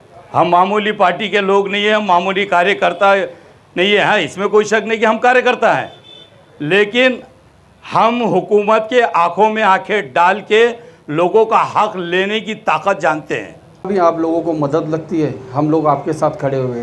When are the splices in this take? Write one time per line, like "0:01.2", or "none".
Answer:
0:13.9